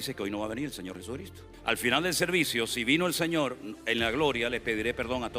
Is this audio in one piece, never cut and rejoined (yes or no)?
no